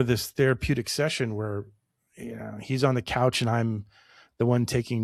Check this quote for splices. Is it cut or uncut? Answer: uncut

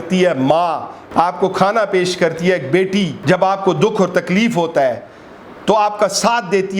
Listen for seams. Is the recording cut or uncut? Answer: cut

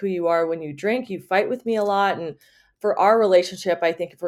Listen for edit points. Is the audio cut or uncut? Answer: uncut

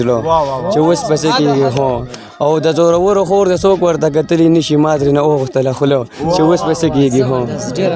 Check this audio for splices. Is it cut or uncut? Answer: uncut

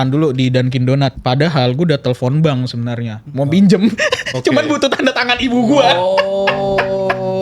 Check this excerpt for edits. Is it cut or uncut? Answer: cut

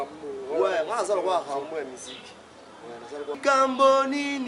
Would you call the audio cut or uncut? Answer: cut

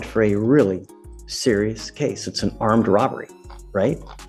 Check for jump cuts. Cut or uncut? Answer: uncut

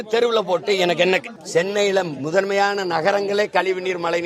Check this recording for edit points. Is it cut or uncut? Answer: cut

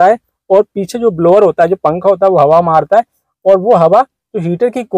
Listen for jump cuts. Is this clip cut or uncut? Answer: uncut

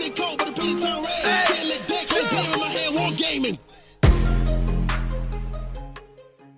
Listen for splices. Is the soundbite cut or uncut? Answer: uncut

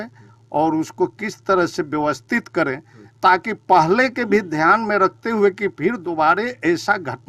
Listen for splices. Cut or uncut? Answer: uncut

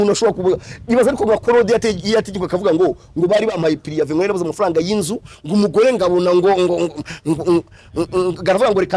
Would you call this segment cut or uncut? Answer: uncut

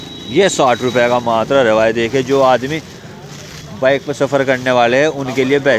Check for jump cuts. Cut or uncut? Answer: uncut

